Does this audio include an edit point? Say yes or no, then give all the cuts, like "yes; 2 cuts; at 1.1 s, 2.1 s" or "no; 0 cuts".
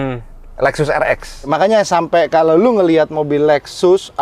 yes; 1 cut; at 1.5 s